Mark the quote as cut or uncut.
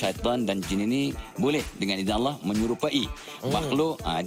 uncut